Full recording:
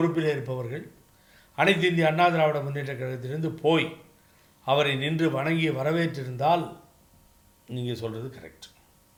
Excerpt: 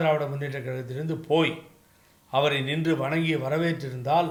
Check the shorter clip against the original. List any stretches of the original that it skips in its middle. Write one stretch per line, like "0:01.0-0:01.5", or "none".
none